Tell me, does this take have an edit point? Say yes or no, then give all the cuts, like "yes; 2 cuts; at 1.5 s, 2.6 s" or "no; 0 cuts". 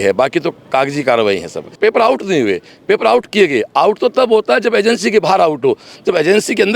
yes; 1 cut; at 1.7 s